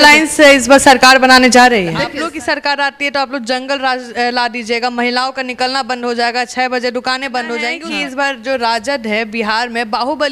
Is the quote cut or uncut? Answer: cut